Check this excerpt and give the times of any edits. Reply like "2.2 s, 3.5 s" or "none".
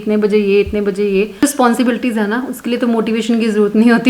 1.4 s